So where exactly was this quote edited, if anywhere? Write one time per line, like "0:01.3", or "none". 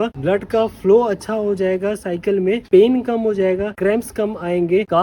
none